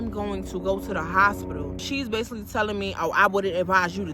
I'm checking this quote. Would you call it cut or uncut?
cut